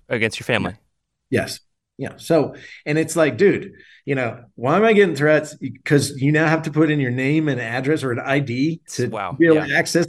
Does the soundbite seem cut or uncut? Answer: uncut